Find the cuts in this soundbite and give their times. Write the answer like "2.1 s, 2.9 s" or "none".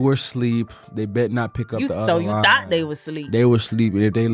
none